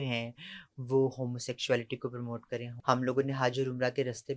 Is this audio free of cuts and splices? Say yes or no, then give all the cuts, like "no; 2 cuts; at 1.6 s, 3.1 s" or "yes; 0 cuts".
no; 1 cut; at 2.7 s